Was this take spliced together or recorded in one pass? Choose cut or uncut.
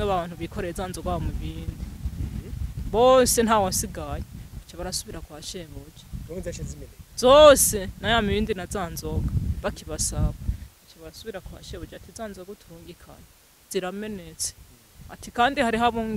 uncut